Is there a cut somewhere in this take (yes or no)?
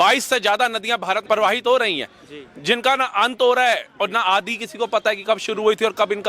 yes